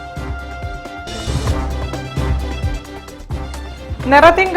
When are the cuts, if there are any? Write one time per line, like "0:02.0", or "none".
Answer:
none

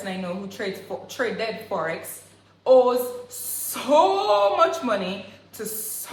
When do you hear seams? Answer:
none

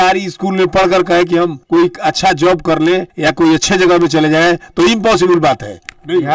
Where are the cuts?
none

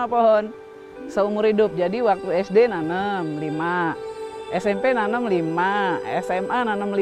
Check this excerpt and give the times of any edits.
none

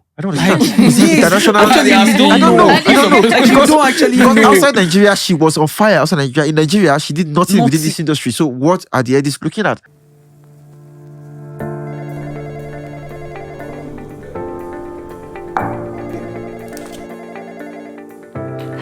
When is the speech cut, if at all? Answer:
0:10.1

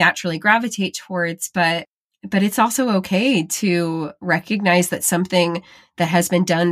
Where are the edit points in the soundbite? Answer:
none

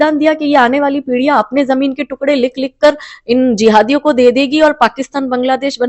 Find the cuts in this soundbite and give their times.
none

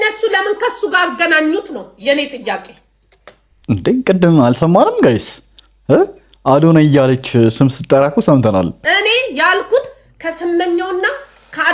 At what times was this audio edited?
0:08.8

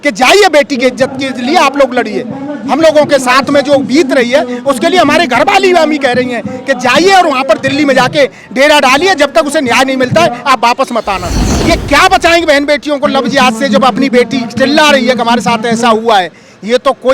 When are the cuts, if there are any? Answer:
0:11.5

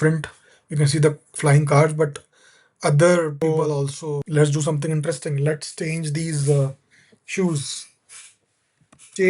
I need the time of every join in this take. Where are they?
0:04.2

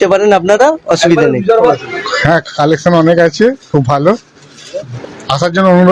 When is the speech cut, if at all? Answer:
0:01.6
0:04.9

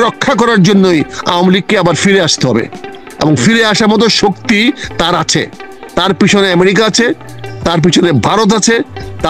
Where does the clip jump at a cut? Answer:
none

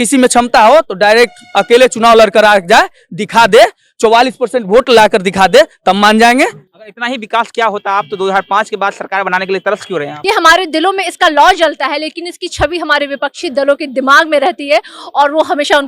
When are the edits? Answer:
0:10.1

